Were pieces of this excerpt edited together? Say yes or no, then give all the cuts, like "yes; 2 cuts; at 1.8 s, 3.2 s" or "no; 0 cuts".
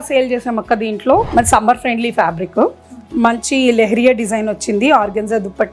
yes; 1 cut; at 1.3 s